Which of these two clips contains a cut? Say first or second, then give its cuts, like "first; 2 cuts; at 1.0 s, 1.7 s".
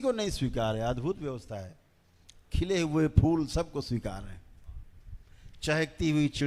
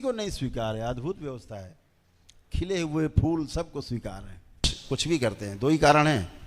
second; 1 cut; at 4.7 s